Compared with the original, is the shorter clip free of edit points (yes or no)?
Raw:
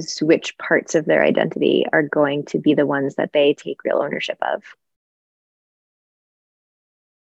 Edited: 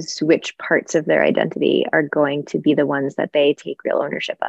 yes